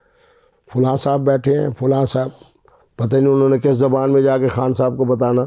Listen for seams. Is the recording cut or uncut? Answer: uncut